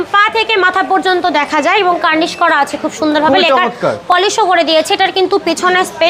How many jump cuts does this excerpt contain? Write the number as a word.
zero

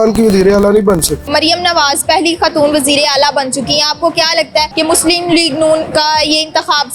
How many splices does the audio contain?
one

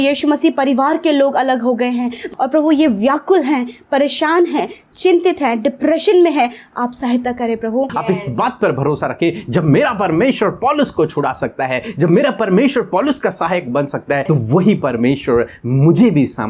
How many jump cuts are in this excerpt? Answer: three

